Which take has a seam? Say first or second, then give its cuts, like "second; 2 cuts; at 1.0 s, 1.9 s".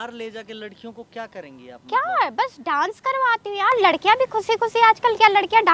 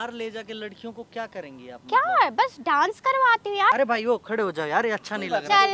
second; 1 cut; at 3.7 s